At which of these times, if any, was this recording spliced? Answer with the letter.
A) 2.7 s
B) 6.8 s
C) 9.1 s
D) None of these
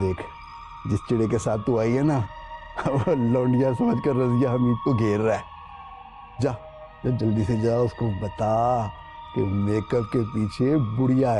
D